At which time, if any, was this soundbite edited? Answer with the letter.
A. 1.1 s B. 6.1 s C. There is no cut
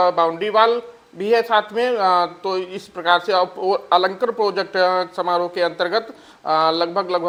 C